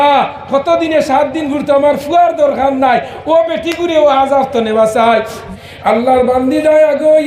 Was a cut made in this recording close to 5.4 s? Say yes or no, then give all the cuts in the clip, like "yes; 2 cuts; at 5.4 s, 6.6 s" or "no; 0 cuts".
yes; 1 cut; at 5.4 s